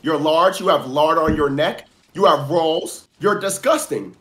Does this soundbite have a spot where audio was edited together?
yes; 1 cut; at 3.0 s

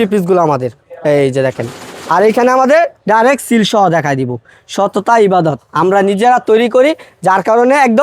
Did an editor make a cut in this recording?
no; 0 cuts

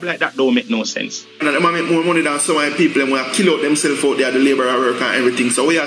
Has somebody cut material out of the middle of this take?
yes; 1 cut; at 1.4 s

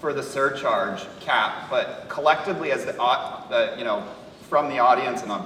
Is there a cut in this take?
no; 0 cuts

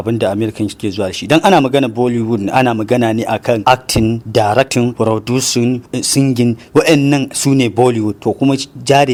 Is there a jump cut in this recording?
no; 0 cuts

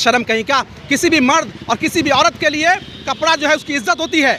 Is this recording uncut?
yes; 0 cuts

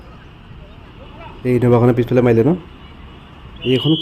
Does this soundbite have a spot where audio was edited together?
yes; 1 cut; at 1.4 s

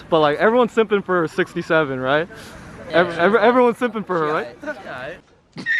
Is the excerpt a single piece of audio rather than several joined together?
no; 1 cut; at 2.9 s

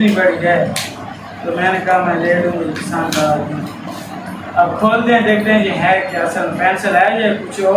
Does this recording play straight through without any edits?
yes; 0 cuts

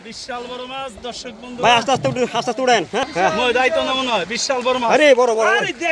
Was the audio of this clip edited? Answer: yes; 1 cut; at 3.0 s

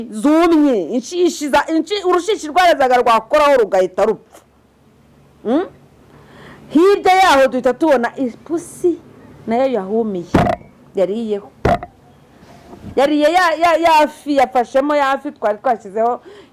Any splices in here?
no; 0 cuts

